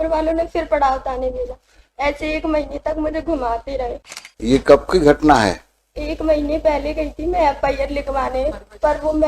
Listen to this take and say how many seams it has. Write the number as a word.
one